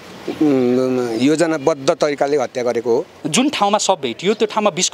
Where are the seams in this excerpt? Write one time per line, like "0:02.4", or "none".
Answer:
0:03.2